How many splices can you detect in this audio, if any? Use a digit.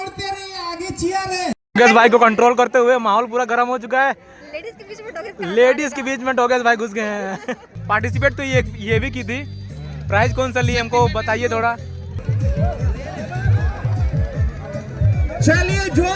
3